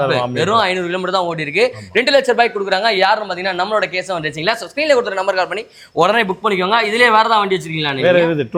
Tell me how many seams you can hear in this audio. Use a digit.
0